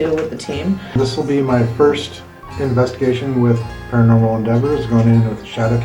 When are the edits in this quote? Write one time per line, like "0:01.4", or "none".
0:01.0

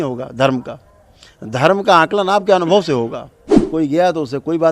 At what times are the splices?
0:03.5

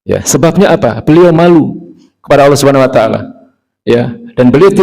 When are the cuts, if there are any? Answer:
none

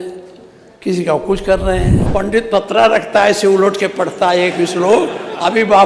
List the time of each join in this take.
0:02.0

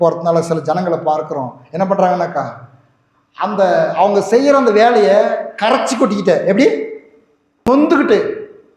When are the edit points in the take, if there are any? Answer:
0:07.7

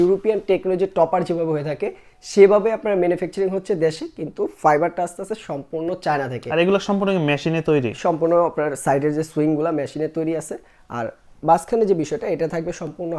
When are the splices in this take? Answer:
none

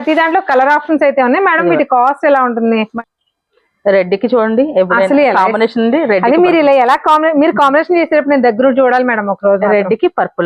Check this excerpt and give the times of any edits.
0:02.9

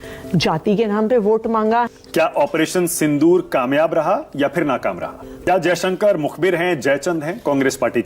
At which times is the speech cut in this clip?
0:02.0
0:05.4

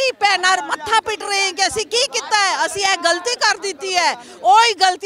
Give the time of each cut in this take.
none

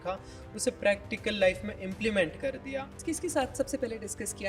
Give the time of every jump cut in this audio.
0:03.0

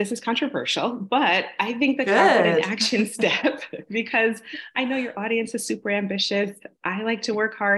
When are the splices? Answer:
none

